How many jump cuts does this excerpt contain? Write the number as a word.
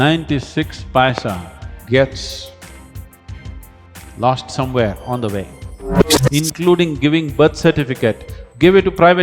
one